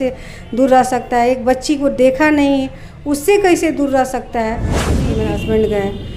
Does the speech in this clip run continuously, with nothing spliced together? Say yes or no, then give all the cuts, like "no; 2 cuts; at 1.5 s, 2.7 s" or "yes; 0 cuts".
no; 1 cut; at 4.9 s